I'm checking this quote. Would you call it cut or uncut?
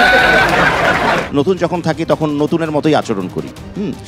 cut